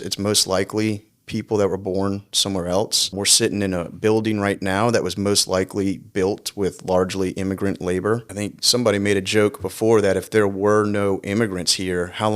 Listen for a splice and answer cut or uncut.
cut